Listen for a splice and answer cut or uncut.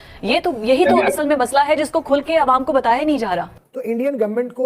cut